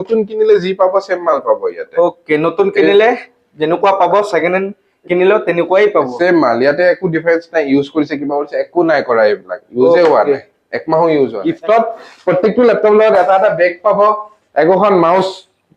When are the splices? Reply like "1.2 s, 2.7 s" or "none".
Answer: 11.4 s

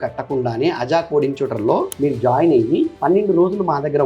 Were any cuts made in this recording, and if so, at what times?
1.9 s, 3.0 s

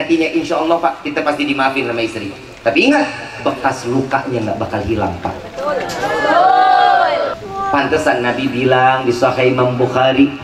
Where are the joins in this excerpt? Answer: 7.3 s

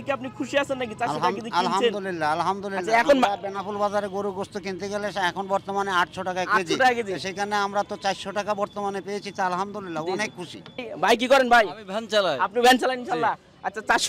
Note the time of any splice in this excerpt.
10.9 s

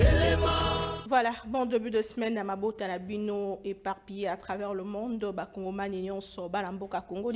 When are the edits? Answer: 1.0 s

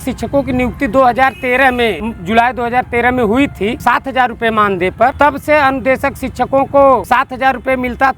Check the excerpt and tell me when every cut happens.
2.1 s, 3.8 s, 5.1 s, 7.0 s

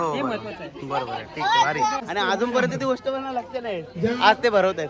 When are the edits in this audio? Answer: 2.1 s

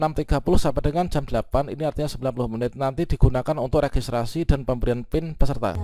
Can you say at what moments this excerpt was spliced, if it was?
none

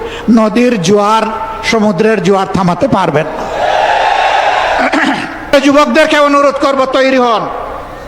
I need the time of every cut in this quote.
5.5 s

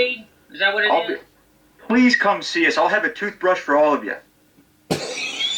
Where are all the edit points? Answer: none

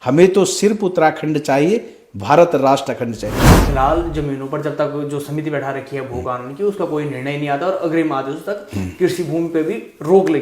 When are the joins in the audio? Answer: 3.5 s

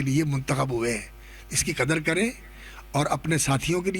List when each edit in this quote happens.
none

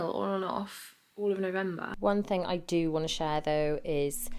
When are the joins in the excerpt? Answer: 1.9 s

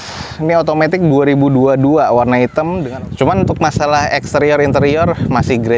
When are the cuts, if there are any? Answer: 2.8 s

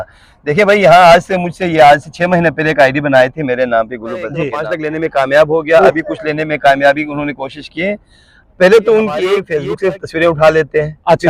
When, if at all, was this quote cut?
4.6 s, 9.5 s

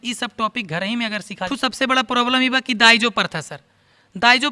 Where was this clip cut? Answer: 1.5 s

